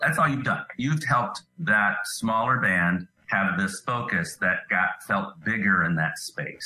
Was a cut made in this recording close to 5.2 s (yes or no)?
no